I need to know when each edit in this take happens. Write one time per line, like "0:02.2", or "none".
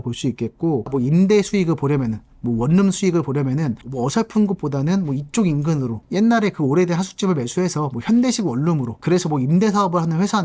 0:00.9
0:06.0
0:08.9